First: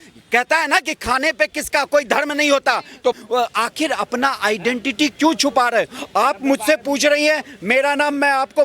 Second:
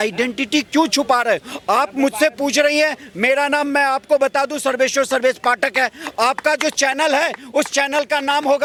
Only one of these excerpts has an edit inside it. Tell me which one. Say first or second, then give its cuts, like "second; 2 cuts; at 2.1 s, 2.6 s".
first; 1 cut; at 3.1 s